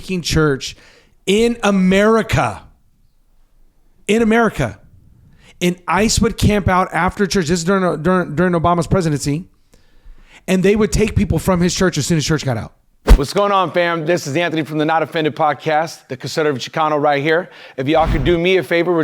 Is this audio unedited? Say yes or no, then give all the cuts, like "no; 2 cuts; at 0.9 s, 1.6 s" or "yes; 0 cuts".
no; 1 cut; at 13.2 s